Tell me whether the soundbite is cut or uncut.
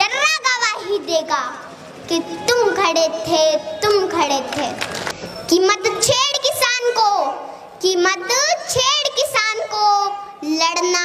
cut